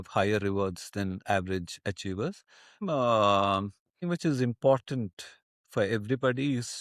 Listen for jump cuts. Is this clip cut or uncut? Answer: cut